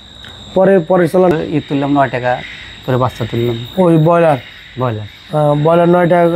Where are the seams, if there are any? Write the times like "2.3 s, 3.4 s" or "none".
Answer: 1.3 s